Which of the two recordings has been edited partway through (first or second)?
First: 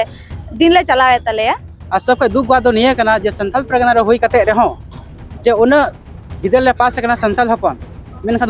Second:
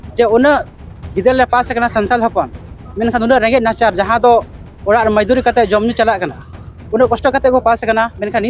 first